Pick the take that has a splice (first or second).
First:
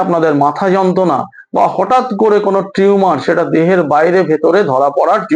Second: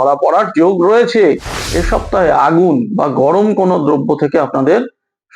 second